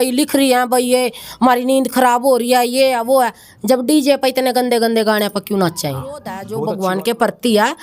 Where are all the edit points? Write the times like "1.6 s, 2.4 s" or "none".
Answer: 6.4 s